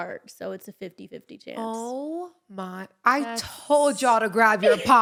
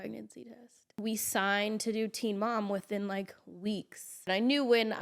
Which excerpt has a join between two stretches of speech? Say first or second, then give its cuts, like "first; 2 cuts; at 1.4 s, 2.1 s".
second; 2 cuts; at 1.0 s, 4.3 s